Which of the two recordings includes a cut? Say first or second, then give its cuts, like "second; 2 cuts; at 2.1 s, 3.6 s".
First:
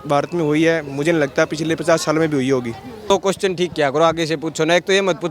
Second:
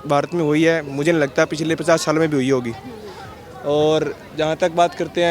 first; 1 cut; at 3.1 s